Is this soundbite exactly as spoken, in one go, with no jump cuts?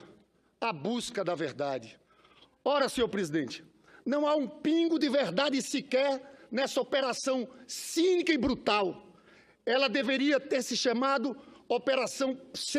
yes; 0 cuts

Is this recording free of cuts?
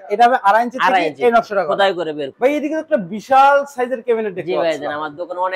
no; 1 cut; at 2.2 s

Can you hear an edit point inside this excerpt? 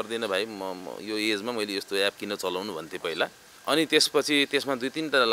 yes; 1 cut; at 3.5 s

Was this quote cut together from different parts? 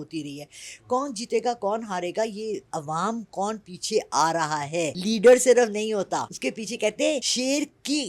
yes; 3 cuts; at 5.0 s, 6.3 s, 7.3 s

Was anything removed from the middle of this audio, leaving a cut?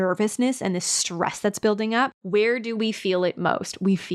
yes; 1 cut; at 2.2 s

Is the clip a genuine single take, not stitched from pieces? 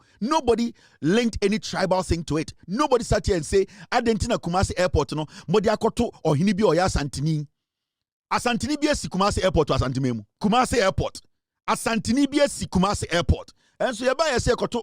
no; 1 cut; at 10.3 s

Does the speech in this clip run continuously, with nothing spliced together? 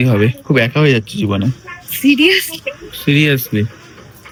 yes; 0 cuts

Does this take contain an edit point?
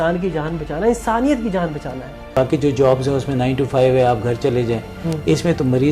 yes; 1 cut; at 2.3 s

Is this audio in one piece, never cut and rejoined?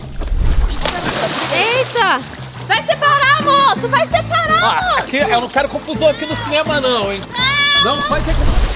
yes; 0 cuts

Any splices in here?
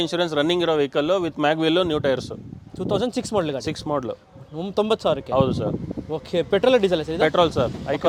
no; 0 cuts

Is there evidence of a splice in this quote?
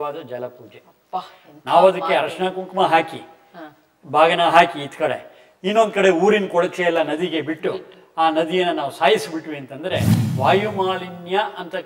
yes; 1 cut; at 10.2 s

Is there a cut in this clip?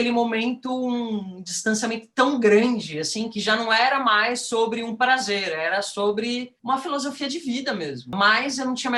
yes; 2 cuts; at 6.5 s, 8.1 s

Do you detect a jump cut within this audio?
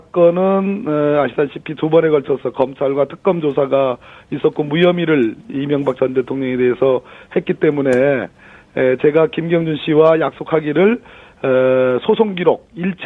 no; 0 cuts

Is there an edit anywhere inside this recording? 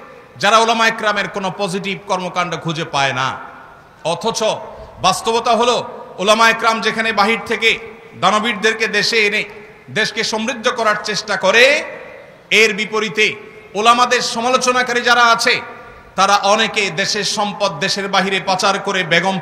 no; 0 cuts

